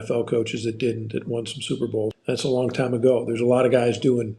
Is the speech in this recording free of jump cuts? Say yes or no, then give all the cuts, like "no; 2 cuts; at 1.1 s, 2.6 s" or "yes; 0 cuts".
no; 1 cut; at 2.2 s